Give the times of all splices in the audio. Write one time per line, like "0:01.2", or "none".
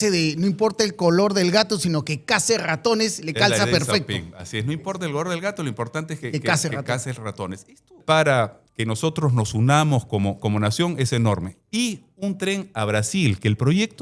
0:08.0